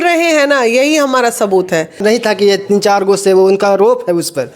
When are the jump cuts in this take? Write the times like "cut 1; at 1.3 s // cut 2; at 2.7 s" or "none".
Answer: cut 1; at 2.0 s